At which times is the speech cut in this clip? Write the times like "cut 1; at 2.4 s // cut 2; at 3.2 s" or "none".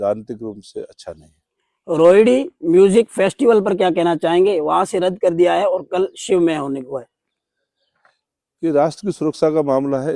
none

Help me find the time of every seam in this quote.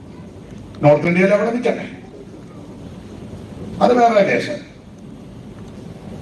none

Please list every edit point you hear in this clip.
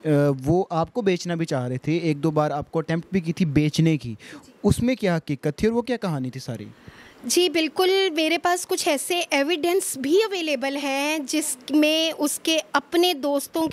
none

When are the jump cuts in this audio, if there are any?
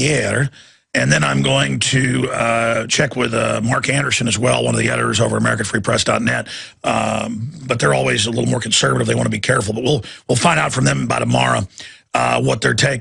cut 1; at 1.2 s

